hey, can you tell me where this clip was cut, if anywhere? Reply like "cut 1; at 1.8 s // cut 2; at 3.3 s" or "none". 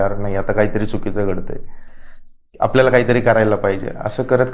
none